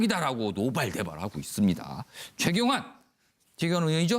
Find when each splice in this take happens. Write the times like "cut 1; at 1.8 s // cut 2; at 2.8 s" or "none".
cut 1; at 2.5 s

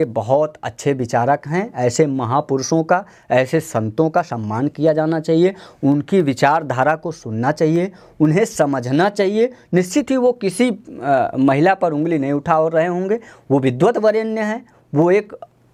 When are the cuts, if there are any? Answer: none

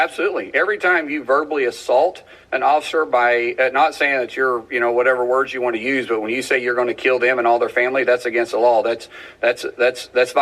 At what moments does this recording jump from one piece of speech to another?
none

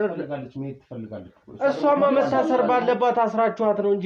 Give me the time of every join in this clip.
none

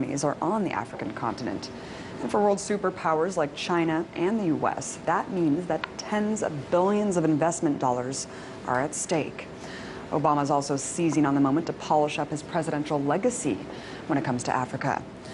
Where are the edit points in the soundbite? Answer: cut 1; at 5.8 s

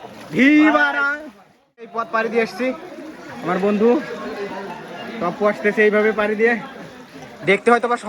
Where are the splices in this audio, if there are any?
cut 1; at 2.1 s

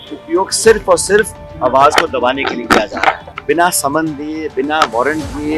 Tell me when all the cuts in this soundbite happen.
cut 1; at 1.4 s // cut 2; at 3.3 s

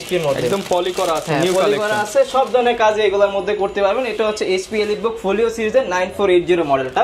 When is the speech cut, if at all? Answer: none

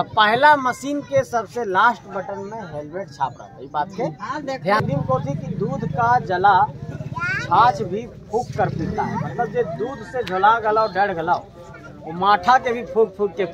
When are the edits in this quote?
cut 1; at 4.8 s

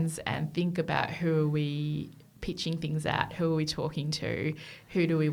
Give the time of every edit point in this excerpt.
none

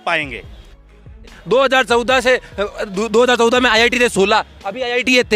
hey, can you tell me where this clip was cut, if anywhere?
cut 1; at 1.0 s

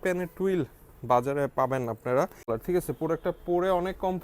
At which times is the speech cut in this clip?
cut 1; at 2.5 s

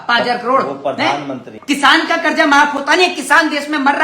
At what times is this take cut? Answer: cut 1; at 1.6 s

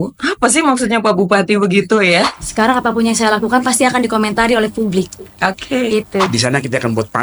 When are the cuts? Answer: cut 1; at 2.4 s // cut 2; at 6.3 s

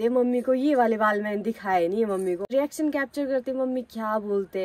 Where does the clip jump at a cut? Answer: cut 1; at 2.5 s

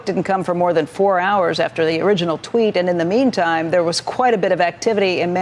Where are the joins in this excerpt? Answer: none

